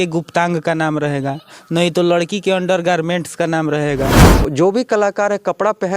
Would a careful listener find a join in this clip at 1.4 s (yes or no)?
no